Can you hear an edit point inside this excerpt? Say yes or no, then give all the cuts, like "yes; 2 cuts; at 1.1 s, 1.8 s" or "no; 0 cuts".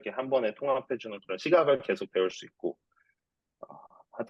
no; 0 cuts